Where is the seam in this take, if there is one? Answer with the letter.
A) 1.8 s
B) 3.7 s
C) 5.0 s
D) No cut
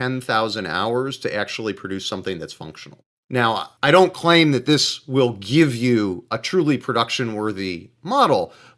B